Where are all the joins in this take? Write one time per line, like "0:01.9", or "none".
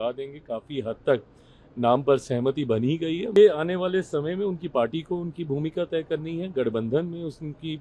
0:03.3